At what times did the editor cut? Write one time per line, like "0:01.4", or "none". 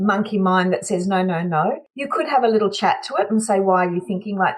0:01.9